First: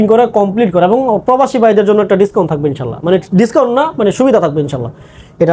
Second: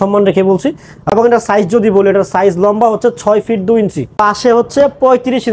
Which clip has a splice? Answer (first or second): second